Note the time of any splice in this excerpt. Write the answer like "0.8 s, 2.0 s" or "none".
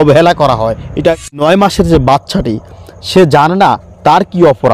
1.4 s